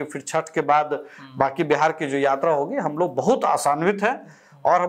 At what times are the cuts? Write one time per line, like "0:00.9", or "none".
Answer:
none